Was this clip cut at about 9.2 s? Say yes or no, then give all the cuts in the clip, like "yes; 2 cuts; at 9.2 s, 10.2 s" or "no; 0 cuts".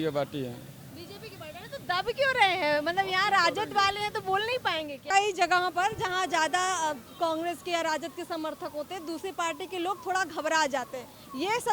no; 1 cut; at 5.1 s